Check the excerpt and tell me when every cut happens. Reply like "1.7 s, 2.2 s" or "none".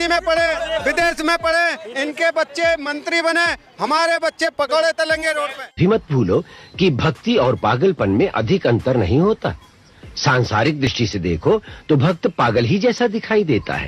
none